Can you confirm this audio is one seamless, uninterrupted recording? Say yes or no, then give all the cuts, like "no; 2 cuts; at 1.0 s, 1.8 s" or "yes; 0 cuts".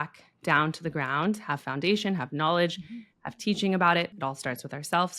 no; 1 cut; at 4.1 s